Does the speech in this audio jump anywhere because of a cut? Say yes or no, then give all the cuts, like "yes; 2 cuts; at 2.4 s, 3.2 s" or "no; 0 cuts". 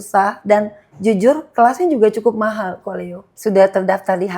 yes; 1 cut; at 3.3 s